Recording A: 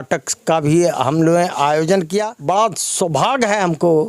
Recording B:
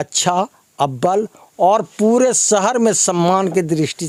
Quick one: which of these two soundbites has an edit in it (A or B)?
A